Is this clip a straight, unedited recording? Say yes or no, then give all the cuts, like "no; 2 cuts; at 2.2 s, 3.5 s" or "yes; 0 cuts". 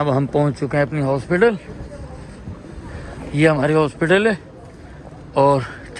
yes; 0 cuts